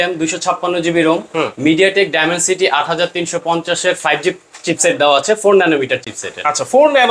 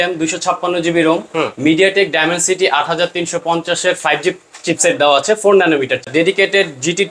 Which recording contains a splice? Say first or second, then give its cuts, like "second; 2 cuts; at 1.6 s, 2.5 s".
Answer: second; 1 cut; at 6.1 s